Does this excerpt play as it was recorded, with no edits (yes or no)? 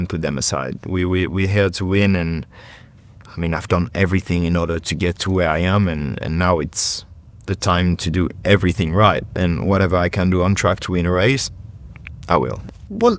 yes